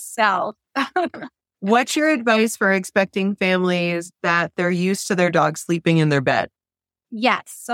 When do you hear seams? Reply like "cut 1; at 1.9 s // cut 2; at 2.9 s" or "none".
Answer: none

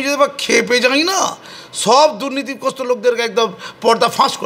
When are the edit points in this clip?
none

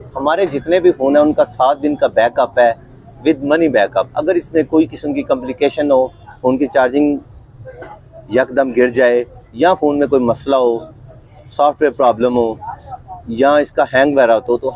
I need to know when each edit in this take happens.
none

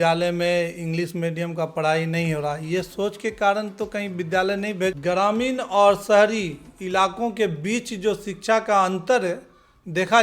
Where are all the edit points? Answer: cut 1; at 5.0 s

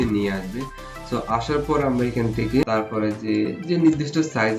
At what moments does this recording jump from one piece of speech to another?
cut 1; at 2.6 s

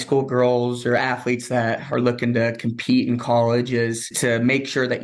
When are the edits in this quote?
cut 1; at 4.1 s

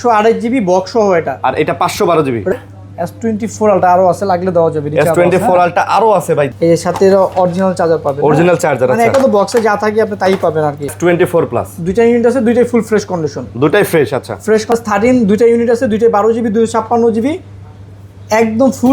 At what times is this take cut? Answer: cut 1; at 2.5 s // cut 2; at 6.5 s // cut 3; at 10.9 s // cut 4; at 14.7 s

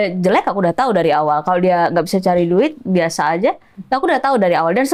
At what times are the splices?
none

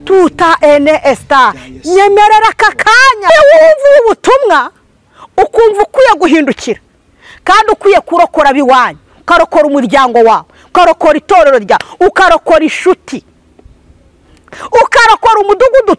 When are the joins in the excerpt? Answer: cut 1; at 3.3 s

